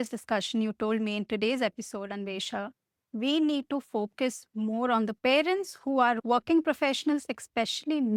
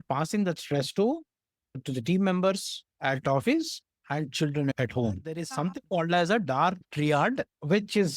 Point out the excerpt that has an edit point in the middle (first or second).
second